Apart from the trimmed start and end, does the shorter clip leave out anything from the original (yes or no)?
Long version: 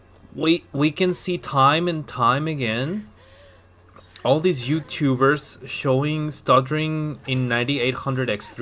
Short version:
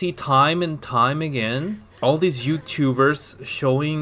yes